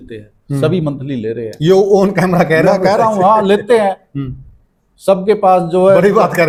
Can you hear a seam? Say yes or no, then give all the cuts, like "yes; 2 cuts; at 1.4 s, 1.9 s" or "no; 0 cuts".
no; 0 cuts